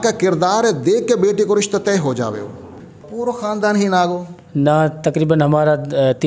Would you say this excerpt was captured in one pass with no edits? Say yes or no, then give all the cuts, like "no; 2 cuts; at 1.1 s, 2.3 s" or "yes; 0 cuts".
no; 1 cut; at 3.0 s